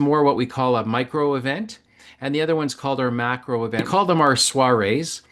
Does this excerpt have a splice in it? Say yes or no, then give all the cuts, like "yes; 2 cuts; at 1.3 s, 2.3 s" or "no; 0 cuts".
yes; 1 cut; at 3.9 s